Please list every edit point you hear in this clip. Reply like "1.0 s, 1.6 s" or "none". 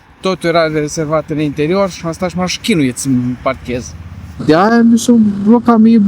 4.4 s